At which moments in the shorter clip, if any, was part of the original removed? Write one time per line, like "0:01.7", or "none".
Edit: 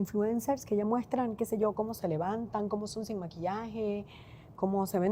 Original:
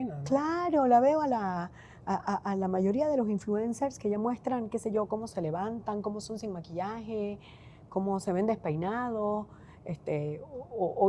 none

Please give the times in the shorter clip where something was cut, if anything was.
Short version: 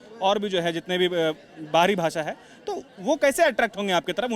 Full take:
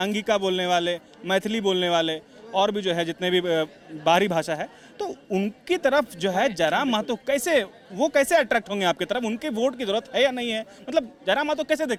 0:02.8

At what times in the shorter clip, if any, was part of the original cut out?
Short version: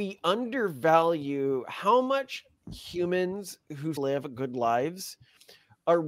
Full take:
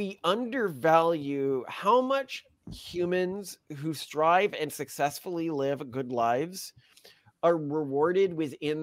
0:04.0

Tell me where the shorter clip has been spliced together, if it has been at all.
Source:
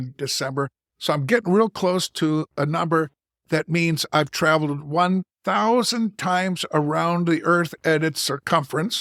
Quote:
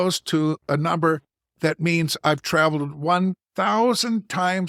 none

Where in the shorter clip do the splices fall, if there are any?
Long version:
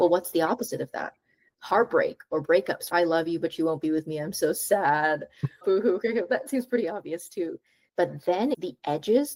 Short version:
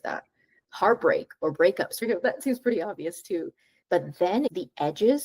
0:02.0

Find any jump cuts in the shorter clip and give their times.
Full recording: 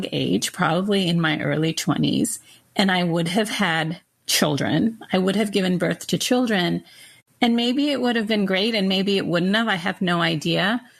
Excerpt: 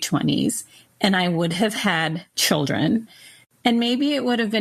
0:02.3
0:03.1

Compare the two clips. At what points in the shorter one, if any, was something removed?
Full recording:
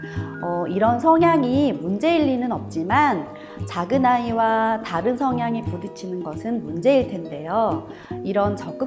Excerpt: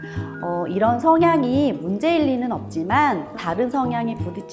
0:03.4

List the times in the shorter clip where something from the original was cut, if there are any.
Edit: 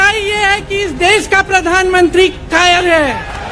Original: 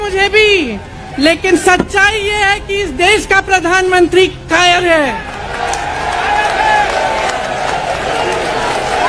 none

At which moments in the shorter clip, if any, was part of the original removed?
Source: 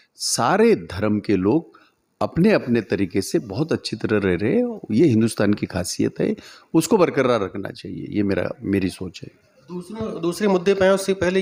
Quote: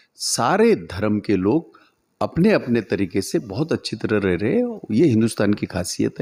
none

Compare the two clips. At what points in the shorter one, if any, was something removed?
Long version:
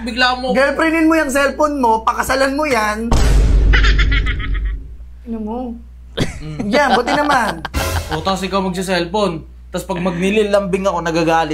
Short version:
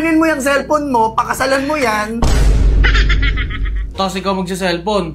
0:03.9

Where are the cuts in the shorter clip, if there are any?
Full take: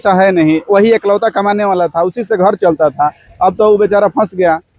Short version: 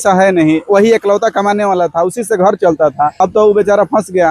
0:03.1

